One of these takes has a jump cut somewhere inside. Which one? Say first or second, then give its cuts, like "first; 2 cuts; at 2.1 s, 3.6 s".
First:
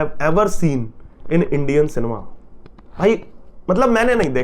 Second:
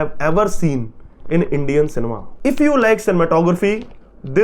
second; 1 cut; at 2.2 s